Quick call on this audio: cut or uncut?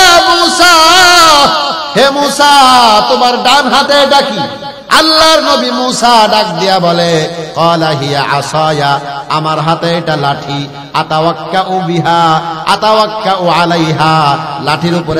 uncut